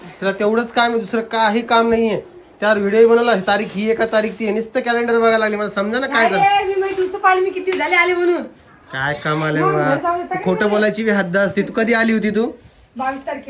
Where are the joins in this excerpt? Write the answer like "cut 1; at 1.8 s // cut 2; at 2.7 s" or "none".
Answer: none